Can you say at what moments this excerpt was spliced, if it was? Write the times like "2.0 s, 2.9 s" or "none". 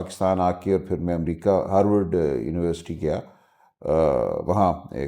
none